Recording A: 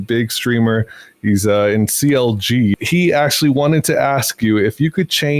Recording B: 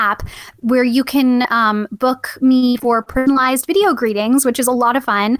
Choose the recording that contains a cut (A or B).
A